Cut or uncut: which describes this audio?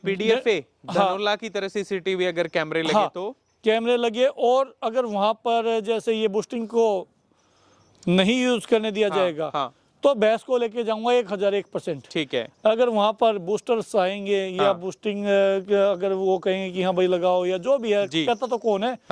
uncut